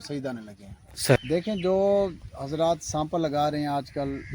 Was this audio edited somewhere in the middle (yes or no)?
yes